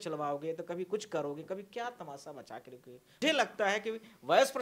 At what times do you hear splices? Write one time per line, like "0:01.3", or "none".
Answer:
0:03.2